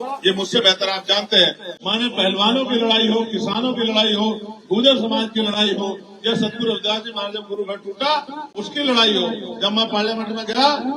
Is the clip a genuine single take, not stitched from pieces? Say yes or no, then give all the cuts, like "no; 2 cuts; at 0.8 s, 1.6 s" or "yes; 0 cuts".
no; 1 cut; at 1.7 s